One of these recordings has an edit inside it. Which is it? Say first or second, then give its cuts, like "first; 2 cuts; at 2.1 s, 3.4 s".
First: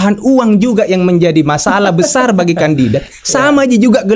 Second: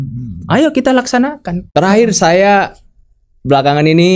second; 1 cut; at 1.5 s